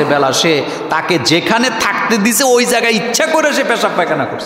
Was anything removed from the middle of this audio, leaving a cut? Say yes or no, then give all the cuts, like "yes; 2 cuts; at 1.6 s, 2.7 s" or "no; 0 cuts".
no; 0 cuts